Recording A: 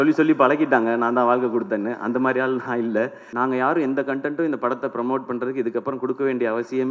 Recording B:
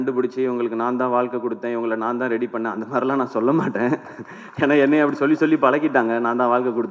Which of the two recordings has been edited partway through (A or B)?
A